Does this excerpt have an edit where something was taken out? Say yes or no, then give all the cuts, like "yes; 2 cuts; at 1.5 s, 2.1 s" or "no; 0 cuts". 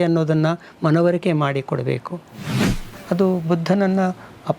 yes; 1 cut; at 2.7 s